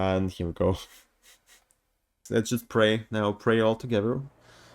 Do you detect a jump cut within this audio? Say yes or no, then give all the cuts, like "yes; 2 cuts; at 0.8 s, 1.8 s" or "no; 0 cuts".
yes; 1 cut; at 2.2 s